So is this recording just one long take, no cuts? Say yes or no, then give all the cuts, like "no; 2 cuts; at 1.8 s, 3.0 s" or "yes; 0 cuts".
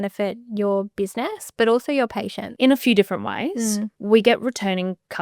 no; 2 cuts; at 2.4 s, 3.9 s